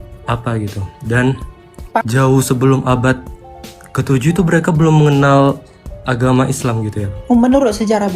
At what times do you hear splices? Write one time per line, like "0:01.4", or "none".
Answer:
0:02.0
0:07.1